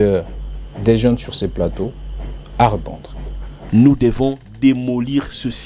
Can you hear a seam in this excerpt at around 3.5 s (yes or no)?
yes